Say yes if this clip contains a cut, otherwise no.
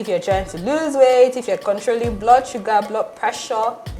yes